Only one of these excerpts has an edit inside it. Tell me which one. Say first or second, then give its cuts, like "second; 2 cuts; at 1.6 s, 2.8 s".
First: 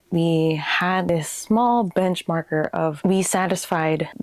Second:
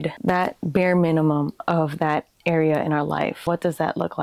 first; 1 cut; at 3.0 s